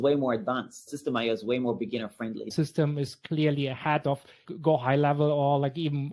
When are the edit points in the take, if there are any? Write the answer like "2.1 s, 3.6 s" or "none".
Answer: 0.9 s, 2.5 s, 4.5 s